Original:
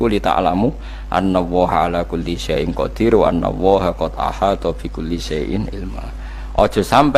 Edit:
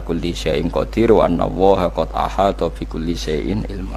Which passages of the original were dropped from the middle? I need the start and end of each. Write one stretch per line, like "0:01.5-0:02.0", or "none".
none